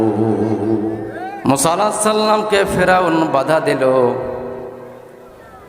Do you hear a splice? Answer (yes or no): yes